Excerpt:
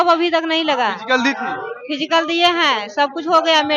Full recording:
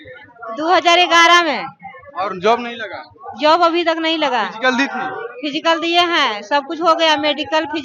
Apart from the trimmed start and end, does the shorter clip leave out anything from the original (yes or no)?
no